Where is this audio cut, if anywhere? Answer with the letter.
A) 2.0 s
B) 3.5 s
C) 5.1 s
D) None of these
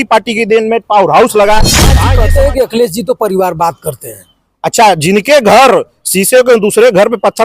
A